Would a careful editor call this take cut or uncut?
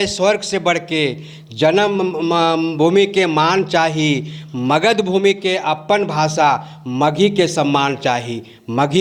uncut